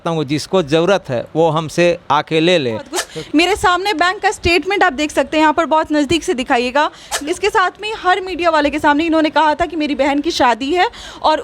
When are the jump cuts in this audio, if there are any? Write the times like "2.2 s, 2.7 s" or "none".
3.0 s, 7.0 s